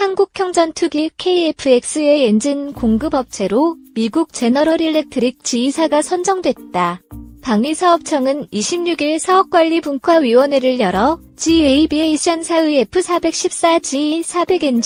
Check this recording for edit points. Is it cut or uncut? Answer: uncut